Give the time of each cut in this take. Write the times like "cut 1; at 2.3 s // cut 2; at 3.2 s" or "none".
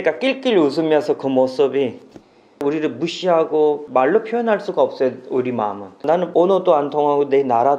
cut 1; at 2.6 s

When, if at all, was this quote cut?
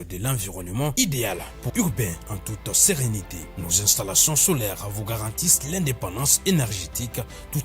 cut 1; at 1.7 s

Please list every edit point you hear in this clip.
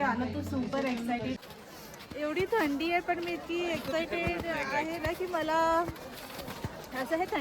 cut 1; at 1.4 s

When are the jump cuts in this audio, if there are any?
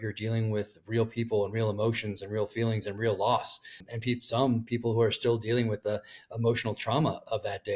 cut 1; at 3.8 s

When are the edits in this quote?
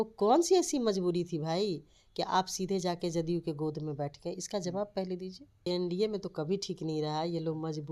cut 1; at 5.7 s

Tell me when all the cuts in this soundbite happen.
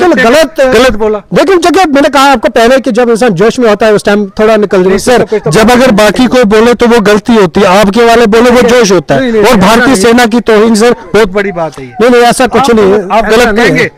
none

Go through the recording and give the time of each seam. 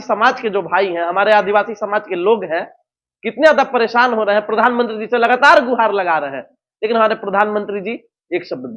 none

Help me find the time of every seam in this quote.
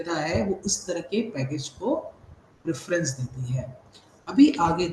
none

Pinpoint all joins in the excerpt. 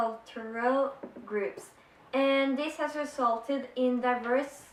none

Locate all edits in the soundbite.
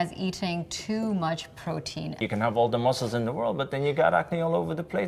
cut 1; at 2.2 s

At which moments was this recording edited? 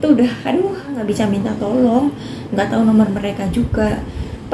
cut 1; at 0.9 s

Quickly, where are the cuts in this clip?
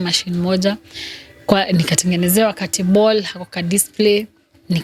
none

